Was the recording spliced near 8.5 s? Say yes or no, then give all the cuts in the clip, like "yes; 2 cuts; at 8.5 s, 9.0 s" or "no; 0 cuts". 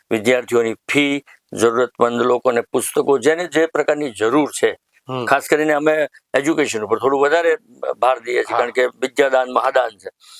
no; 0 cuts